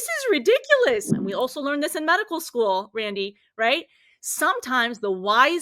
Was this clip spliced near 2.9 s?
no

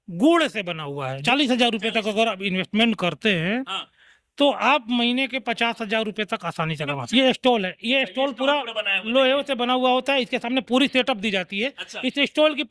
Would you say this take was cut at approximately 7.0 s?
yes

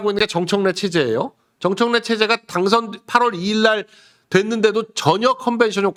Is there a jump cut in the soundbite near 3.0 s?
no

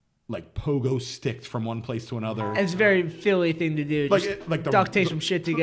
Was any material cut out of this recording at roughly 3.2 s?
no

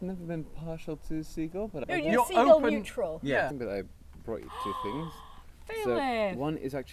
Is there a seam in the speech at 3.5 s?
yes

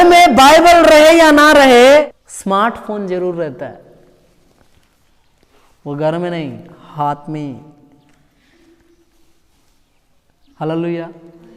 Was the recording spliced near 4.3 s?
no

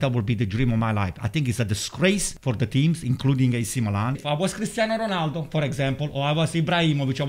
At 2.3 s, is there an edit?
yes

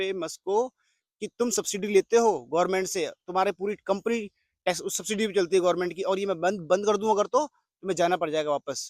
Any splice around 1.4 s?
no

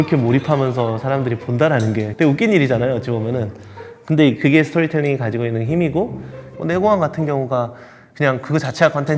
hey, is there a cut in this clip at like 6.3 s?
yes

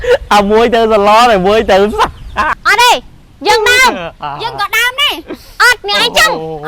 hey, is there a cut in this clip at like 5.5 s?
no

